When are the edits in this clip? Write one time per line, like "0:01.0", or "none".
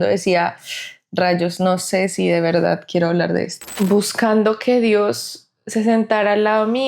0:04.0